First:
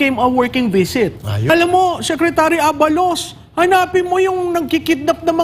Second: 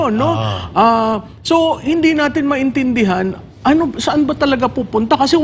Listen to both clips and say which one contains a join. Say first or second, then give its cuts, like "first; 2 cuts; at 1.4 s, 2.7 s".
first; 1 cut; at 1.5 s